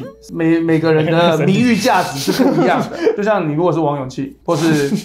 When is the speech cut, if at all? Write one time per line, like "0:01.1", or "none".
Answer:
0:03.2